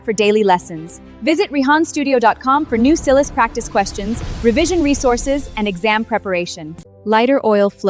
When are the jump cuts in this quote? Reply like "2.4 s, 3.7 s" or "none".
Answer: 6.8 s

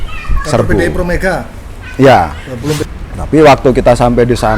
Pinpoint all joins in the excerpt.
2.8 s

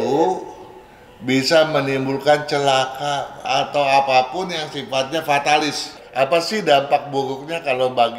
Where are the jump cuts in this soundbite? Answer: 3.4 s, 6.0 s

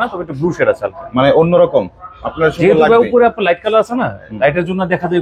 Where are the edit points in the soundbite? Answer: none

